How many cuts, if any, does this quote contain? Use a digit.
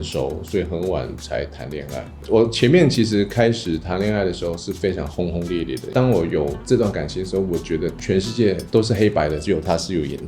2